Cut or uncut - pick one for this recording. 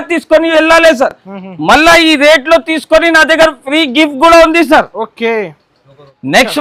uncut